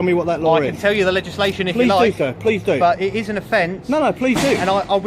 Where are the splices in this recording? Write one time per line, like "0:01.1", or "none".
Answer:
0:03.8